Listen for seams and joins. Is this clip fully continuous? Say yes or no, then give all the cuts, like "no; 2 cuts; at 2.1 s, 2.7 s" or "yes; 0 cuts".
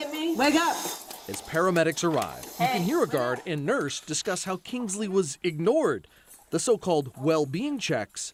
yes; 0 cuts